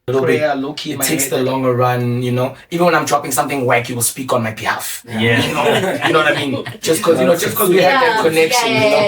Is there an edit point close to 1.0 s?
yes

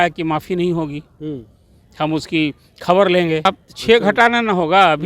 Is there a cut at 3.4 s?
yes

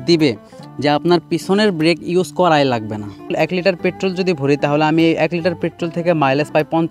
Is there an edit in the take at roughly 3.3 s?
yes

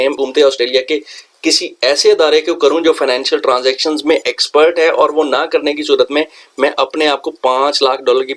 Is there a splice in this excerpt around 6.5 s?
no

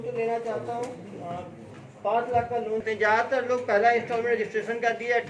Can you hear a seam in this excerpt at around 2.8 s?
yes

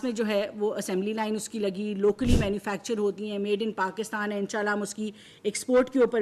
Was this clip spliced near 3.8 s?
no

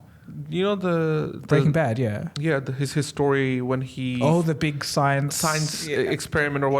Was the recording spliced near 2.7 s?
no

